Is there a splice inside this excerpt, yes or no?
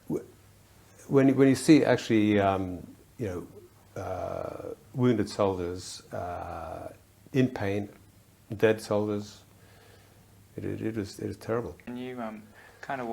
yes